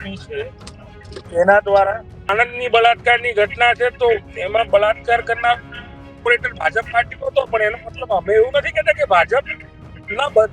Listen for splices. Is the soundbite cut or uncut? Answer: cut